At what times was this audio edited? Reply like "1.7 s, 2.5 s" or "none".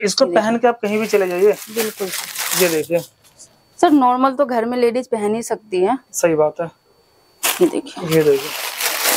none